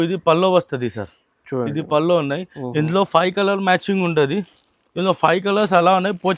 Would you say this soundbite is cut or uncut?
uncut